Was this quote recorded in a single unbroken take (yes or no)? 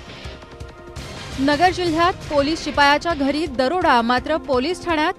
no